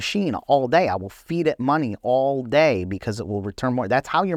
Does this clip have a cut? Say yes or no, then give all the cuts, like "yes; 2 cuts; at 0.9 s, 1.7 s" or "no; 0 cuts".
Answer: no; 0 cuts